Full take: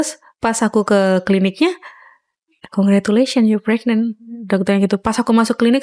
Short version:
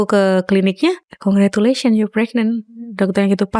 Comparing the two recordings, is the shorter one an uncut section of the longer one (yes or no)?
no